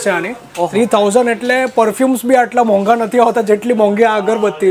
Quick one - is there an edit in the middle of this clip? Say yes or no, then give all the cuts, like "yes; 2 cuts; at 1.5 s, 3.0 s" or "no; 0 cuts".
no; 0 cuts